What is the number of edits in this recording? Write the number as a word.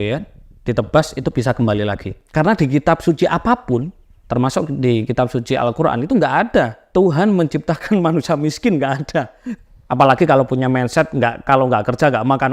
three